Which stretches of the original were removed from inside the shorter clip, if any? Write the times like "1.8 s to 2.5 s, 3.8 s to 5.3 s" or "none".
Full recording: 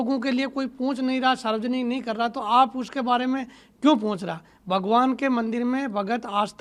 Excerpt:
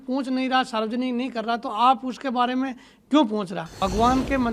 4.4 s to 4.6 s